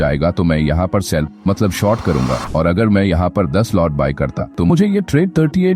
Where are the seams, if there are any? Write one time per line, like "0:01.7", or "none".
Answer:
0:02.4
0:04.4